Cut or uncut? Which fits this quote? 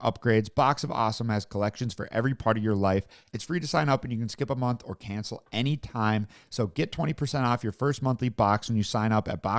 cut